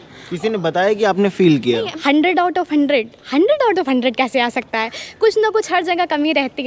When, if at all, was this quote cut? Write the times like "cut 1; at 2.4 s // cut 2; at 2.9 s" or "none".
cut 1; at 1.9 s